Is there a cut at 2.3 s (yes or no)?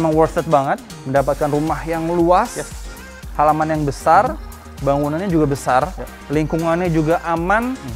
no